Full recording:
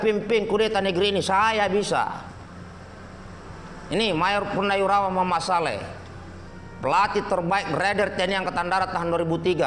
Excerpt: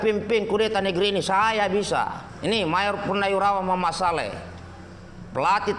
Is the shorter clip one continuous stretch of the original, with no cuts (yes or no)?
no